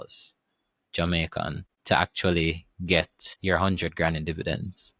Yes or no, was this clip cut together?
yes